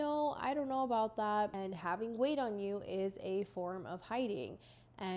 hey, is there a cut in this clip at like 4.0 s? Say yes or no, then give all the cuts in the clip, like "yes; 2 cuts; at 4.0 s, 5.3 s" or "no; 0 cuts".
no; 1 cut; at 1.6 s